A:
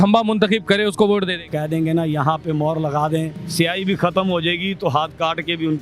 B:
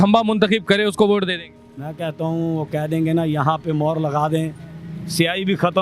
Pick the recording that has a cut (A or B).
A